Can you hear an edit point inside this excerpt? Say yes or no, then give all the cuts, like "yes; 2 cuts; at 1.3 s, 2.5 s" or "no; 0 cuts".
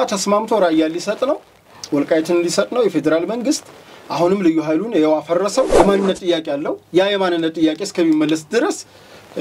yes; 1 cut; at 5.7 s